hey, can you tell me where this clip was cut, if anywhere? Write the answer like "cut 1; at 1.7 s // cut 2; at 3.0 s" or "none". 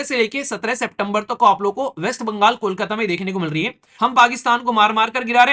cut 1; at 3.8 s